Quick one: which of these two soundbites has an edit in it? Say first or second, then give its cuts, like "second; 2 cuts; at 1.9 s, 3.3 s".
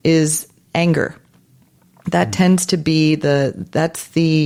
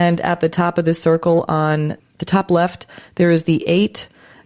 second; 1 cut; at 2.1 s